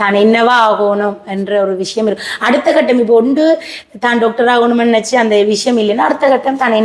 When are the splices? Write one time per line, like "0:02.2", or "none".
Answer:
none